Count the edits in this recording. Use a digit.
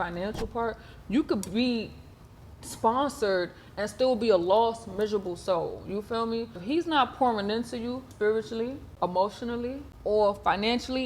4